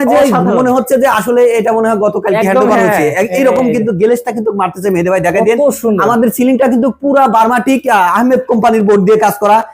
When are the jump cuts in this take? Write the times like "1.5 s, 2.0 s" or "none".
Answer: none